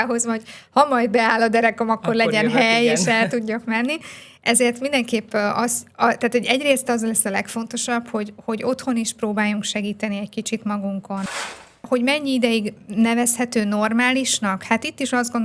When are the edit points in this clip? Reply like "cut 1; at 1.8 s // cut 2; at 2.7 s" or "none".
cut 1; at 11.3 s

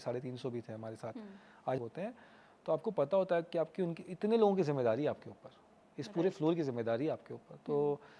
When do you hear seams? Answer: cut 1; at 1.8 s

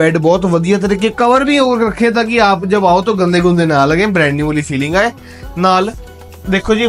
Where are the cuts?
none

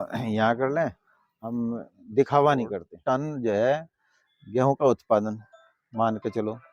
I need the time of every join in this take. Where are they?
cut 1; at 2.9 s

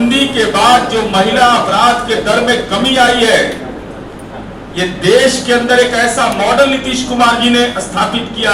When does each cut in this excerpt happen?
none

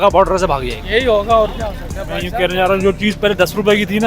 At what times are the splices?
cut 1; at 2.2 s

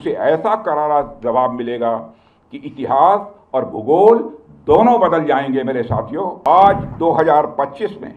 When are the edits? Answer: cut 1; at 6.4 s

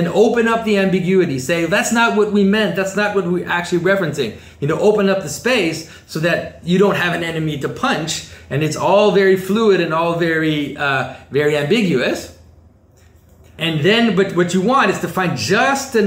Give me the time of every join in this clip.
cut 1; at 13.6 s

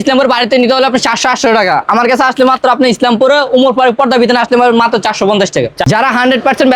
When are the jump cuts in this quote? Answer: cut 1; at 5.8 s

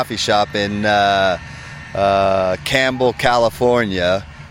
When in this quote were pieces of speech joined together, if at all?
none

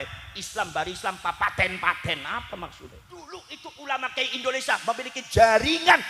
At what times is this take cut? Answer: cut 1; at 3.4 s

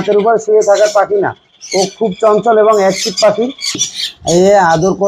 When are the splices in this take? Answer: cut 1; at 3.9 s

